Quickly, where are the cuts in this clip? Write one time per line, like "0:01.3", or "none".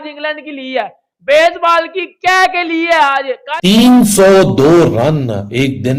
0:03.6